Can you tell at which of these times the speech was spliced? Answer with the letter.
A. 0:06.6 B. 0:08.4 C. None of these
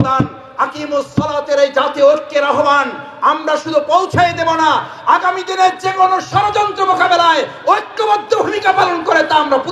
C